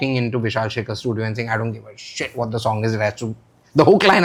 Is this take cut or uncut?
uncut